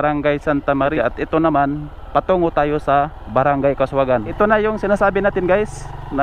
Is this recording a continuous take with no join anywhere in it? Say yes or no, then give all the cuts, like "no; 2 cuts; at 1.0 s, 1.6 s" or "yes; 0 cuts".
no; 2 cuts; at 0.9 s, 4.4 s